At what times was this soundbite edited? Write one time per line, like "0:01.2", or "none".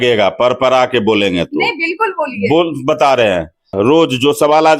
0:03.7